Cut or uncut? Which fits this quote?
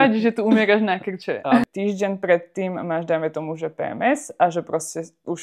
cut